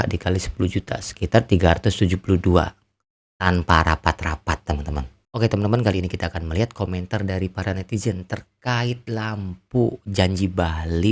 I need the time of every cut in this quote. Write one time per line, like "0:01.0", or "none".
none